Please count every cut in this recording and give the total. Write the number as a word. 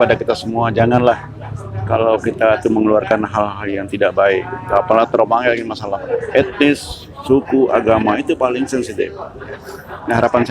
zero